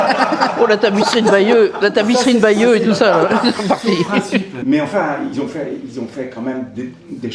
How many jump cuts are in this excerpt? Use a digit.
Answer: 1